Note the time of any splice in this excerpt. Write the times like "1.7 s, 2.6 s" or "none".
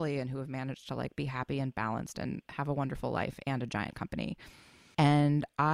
4.8 s